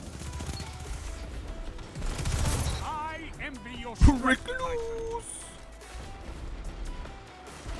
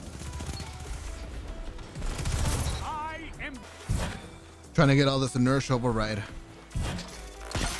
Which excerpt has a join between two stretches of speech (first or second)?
second